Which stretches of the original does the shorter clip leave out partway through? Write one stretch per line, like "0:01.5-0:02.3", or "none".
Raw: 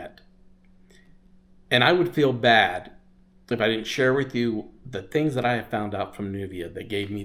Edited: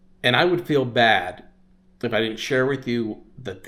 none

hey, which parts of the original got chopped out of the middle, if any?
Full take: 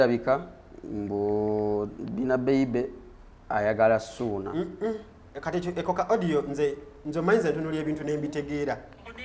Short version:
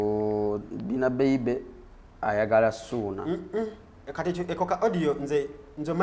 none

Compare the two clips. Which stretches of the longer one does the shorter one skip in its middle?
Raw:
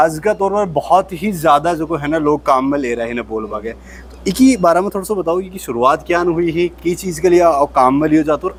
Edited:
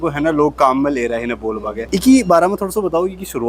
0:03.6-0:04.1

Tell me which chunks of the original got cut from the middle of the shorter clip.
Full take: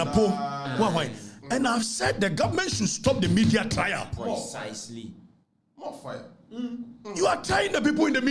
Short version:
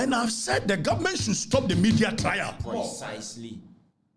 none

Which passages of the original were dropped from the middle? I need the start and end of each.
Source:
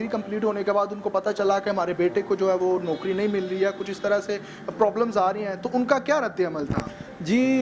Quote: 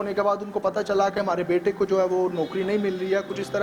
none

